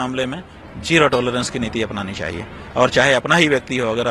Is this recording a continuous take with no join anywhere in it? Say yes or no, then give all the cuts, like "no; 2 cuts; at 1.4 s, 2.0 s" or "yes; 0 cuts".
yes; 0 cuts